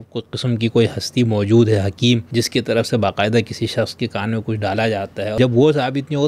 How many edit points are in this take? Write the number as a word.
two